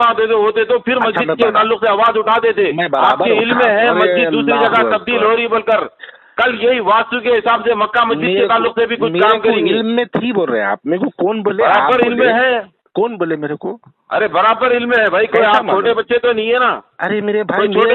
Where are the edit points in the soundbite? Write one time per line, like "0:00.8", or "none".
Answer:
none